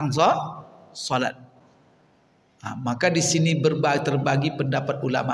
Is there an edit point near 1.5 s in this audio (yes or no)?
yes